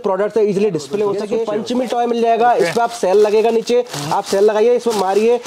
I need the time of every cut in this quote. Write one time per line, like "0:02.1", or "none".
0:01.4